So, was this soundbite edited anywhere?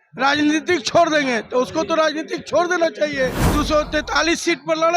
yes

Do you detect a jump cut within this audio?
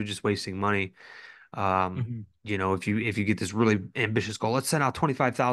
no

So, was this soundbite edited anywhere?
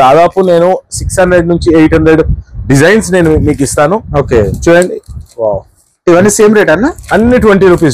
no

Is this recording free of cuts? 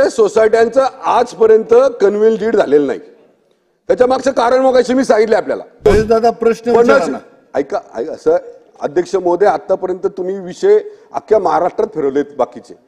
no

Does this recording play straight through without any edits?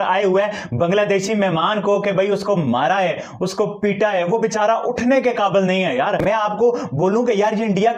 no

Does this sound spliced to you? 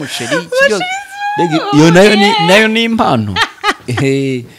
no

